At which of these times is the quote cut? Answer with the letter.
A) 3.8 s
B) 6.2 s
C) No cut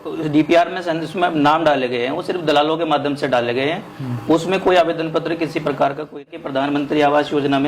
B